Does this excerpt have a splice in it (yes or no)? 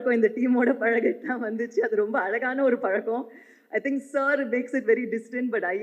no